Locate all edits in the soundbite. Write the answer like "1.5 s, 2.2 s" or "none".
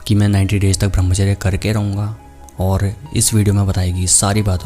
none